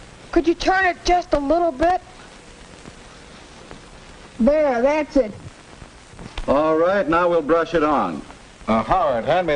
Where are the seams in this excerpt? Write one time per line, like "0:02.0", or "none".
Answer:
none